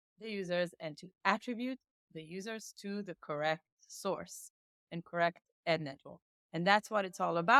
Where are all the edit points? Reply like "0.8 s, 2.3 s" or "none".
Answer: none